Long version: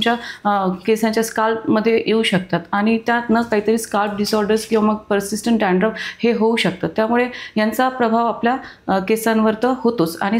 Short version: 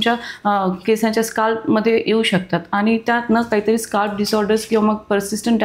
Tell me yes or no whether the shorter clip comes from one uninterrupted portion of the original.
yes